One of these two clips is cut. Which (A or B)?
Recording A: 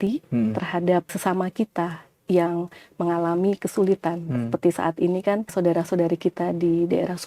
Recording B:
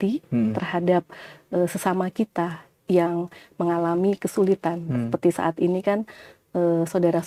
A